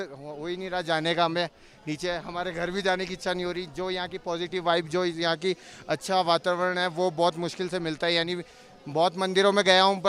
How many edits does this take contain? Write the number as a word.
zero